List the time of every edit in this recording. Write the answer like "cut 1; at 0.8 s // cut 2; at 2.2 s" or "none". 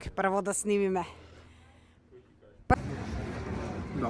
cut 1; at 2.7 s

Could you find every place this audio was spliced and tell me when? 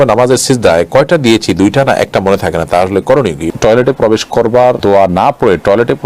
cut 1; at 3.5 s // cut 2; at 4.8 s

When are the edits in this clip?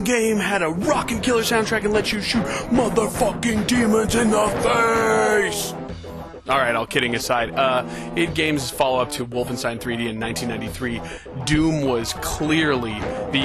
cut 1; at 9.3 s

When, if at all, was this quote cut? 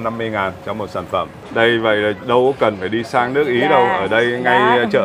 cut 1; at 1.4 s

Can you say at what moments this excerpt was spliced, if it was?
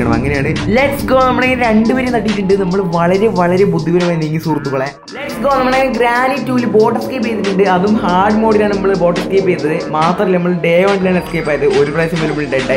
cut 1; at 2.7 s // cut 2; at 5.3 s

